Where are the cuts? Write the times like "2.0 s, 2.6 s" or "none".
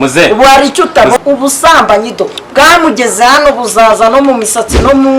1.2 s

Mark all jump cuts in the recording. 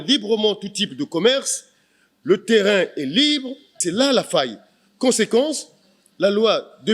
3.8 s

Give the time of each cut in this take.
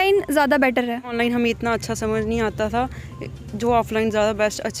1.1 s

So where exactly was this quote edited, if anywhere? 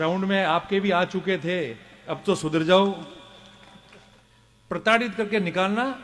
4.2 s

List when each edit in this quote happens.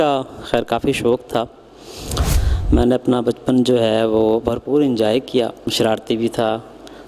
2.2 s, 5.7 s

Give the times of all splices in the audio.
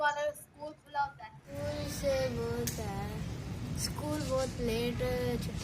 1.5 s

